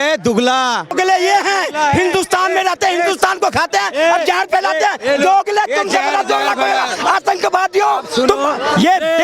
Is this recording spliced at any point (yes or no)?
yes